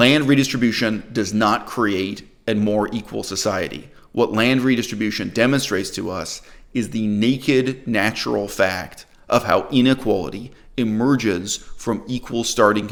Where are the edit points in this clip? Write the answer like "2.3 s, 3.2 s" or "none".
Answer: none